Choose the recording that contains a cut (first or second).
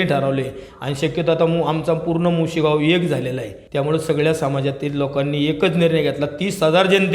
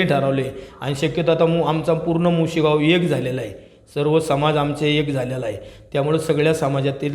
first